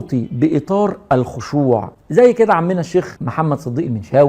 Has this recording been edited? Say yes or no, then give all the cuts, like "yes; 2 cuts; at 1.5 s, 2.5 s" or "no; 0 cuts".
yes; 2 cuts; at 2.0 s, 3.2 s